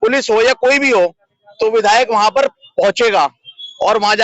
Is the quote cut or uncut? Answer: uncut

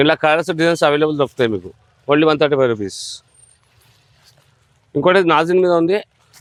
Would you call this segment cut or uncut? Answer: uncut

